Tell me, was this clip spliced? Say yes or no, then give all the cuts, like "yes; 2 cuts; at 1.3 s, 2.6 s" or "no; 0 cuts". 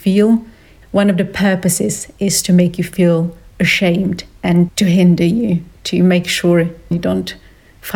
yes; 1 cut; at 6.9 s